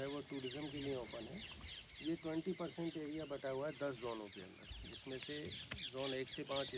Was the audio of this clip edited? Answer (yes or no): no